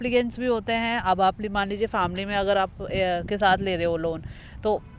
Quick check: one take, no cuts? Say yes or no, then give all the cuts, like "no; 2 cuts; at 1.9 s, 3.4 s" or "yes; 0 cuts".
yes; 0 cuts